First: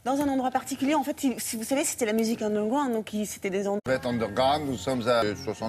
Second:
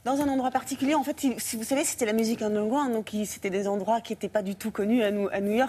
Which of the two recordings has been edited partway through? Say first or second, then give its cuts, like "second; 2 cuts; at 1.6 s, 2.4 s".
second; 1 cut; at 3.8 s